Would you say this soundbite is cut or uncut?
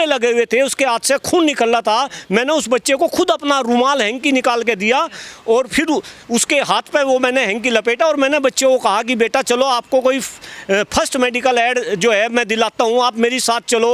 uncut